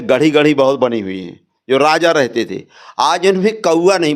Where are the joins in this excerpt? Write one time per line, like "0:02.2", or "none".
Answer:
none